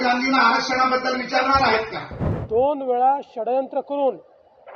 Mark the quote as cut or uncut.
cut